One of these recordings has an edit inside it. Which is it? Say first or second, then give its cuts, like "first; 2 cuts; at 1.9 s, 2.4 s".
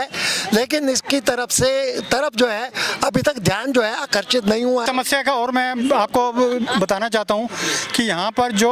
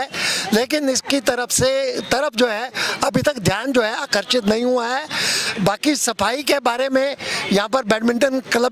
first; 1 cut; at 4.8 s